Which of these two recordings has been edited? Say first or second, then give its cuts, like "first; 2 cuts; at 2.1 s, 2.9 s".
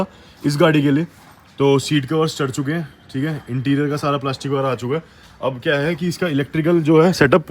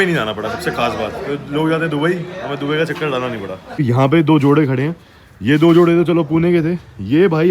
second; 1 cut; at 3.8 s